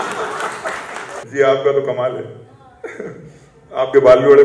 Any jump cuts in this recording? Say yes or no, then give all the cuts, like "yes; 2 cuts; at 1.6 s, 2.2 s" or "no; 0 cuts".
yes; 1 cut; at 1.2 s